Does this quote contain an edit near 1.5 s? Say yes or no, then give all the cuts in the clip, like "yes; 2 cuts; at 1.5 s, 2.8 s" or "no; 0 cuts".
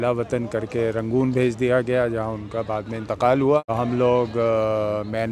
no; 1 cut; at 3.7 s